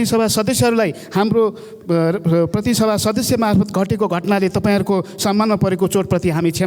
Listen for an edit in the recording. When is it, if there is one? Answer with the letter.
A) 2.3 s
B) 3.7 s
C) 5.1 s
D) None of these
D